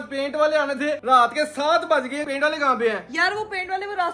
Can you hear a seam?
no; 0 cuts

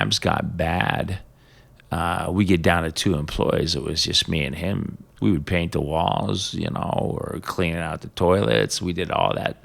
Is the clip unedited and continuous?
no; 1 cut; at 5.1 s

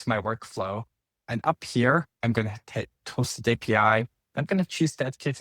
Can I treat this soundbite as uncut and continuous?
no; 1 cut; at 2.1 s

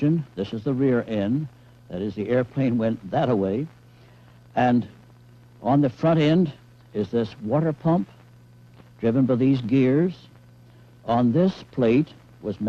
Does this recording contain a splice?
no; 0 cuts

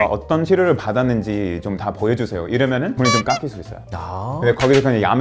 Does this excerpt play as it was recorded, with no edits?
yes; 0 cuts

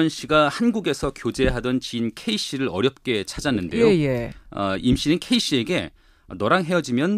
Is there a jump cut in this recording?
yes; 1 cut; at 1.9 s

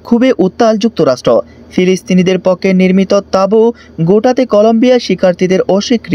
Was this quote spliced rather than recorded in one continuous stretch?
no; 0 cuts

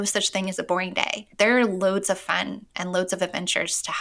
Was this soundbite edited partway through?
yes; 1 cut; at 1.2 s

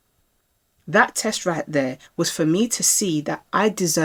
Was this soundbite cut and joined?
no; 0 cuts

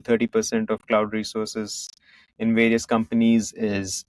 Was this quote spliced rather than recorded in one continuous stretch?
no; 0 cuts

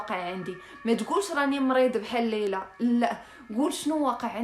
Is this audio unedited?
yes; 0 cuts

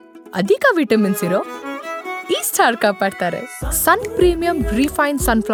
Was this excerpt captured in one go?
yes; 0 cuts

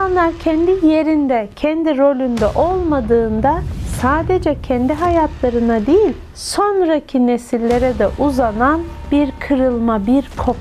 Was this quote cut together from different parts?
no; 0 cuts

